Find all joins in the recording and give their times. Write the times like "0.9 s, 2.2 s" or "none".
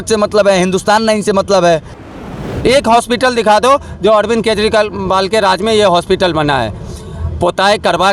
2.3 s